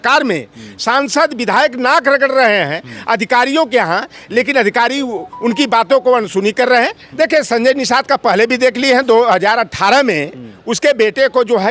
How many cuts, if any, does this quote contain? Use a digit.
1